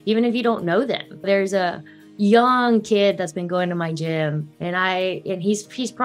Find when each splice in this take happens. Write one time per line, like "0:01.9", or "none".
0:01.2